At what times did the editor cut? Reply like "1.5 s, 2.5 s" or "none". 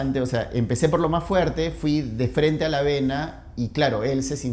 none